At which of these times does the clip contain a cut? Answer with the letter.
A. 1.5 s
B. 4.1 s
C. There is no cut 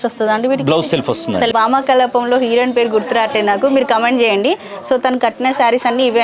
A